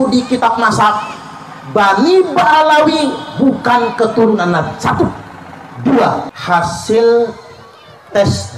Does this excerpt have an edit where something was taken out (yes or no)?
yes